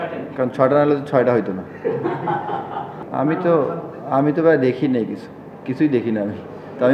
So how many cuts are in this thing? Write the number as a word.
one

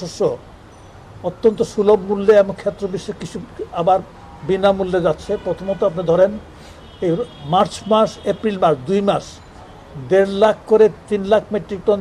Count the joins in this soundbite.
zero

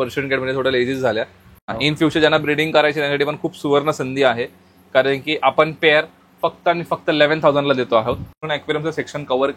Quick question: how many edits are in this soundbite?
two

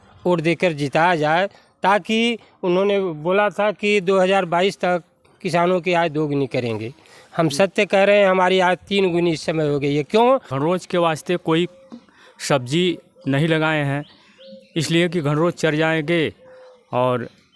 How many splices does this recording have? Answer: one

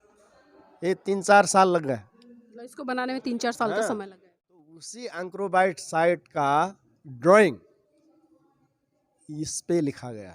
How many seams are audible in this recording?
one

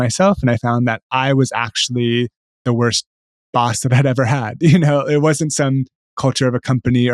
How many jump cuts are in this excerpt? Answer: zero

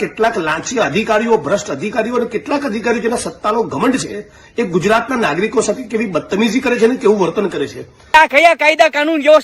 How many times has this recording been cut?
one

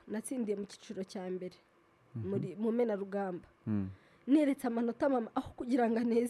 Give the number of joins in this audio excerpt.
zero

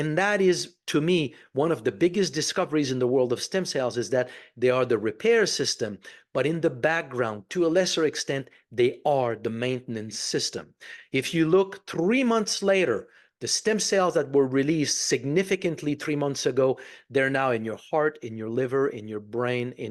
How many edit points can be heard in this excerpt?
zero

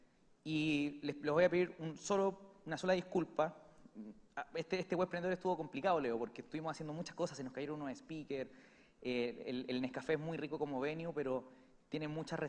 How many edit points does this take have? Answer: one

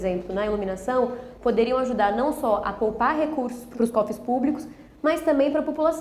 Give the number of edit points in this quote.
one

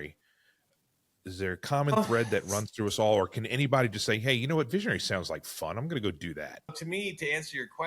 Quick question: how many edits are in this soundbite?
one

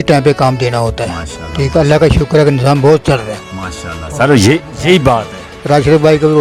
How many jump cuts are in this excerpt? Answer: zero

